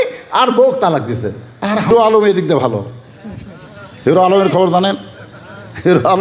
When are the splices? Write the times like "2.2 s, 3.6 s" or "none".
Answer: 1.9 s